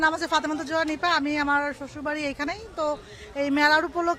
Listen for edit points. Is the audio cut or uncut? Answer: uncut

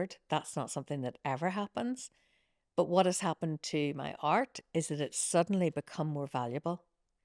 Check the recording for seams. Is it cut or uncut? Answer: uncut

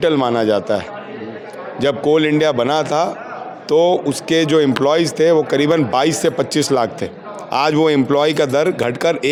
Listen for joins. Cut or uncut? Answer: uncut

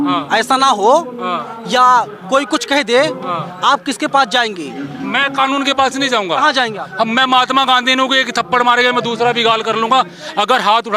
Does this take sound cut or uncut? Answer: uncut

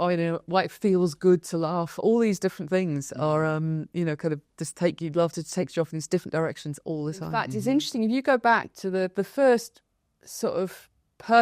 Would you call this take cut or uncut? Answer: cut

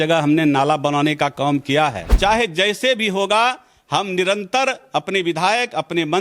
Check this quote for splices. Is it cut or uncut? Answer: cut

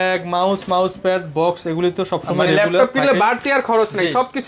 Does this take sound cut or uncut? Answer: uncut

